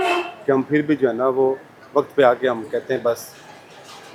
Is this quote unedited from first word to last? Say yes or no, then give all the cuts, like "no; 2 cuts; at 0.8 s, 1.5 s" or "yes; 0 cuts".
yes; 0 cuts